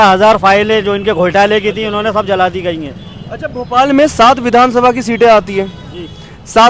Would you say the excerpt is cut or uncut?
uncut